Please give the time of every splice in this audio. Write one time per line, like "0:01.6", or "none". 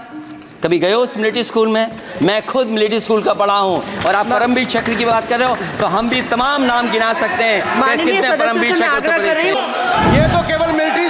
0:09.5